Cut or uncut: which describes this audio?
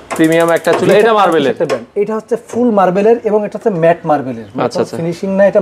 uncut